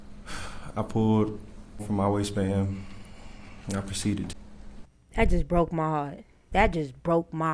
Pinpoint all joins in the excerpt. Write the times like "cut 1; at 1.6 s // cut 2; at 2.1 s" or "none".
cut 1; at 1.8 s // cut 2; at 4.3 s